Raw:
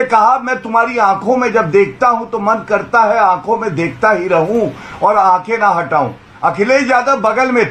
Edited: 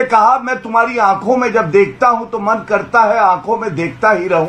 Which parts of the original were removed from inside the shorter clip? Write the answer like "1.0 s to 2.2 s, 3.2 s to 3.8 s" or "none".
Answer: none